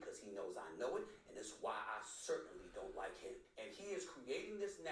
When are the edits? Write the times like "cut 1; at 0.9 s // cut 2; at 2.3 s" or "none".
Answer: cut 1; at 3.5 s